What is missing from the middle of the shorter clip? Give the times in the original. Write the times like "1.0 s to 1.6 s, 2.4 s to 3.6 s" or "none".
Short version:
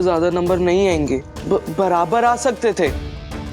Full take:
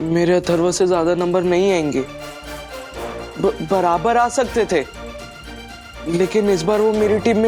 2.2 s to 3.3 s